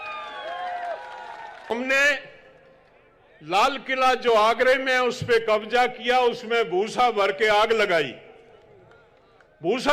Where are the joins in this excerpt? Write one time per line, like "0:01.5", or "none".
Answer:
0:01.7